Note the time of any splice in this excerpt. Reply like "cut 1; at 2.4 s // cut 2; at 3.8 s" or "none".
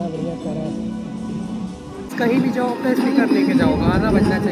cut 1; at 2.1 s